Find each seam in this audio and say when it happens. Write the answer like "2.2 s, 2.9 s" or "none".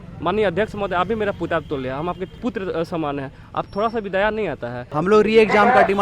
2.3 s, 4.9 s